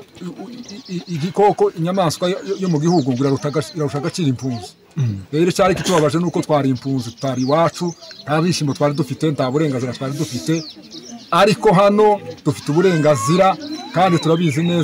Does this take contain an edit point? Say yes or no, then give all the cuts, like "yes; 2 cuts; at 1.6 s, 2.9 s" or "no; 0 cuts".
no; 0 cuts